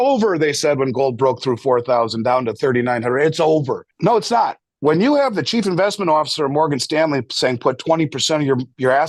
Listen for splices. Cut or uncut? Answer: cut